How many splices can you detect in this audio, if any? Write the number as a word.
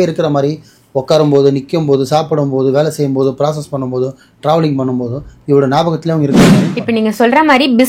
one